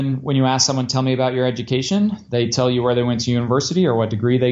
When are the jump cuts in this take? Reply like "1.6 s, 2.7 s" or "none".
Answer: none